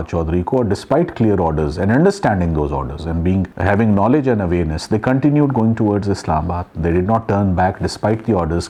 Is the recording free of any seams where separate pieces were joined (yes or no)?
yes